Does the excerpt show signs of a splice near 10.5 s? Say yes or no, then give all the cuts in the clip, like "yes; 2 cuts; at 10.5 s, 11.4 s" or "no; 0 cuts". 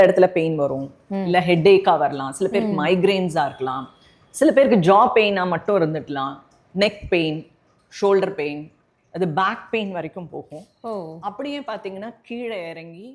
no; 0 cuts